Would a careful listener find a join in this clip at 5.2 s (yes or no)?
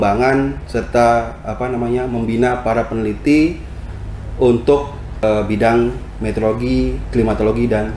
yes